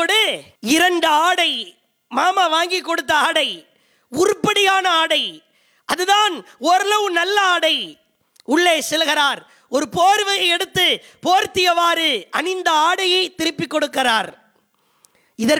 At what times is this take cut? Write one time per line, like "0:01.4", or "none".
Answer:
none